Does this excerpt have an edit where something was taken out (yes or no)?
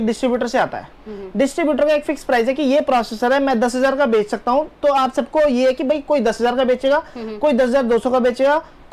no